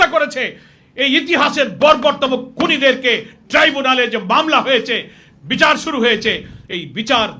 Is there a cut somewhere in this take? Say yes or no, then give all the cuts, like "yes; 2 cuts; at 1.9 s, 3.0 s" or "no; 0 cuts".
no; 0 cuts